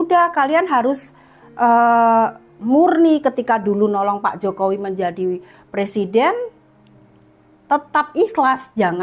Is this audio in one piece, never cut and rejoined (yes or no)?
yes